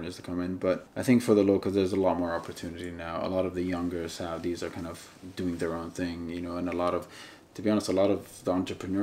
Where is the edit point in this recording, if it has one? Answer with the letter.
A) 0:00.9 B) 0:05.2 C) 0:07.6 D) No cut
A